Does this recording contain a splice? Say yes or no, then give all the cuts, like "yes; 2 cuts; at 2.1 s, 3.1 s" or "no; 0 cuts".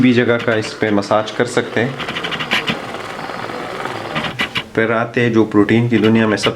yes; 1 cut; at 4.4 s